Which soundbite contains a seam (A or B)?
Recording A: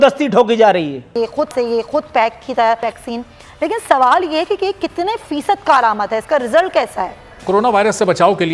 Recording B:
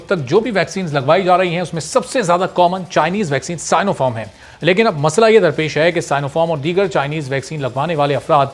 A